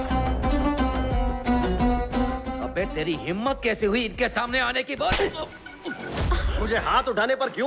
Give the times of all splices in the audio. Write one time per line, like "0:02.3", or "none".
0:02.3
0:06.5